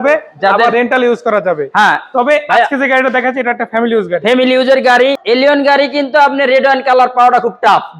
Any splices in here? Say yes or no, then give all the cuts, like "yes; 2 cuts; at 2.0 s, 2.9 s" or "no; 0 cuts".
yes; 1 cut; at 5.2 s